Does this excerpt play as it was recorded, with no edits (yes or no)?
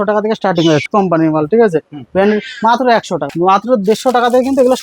no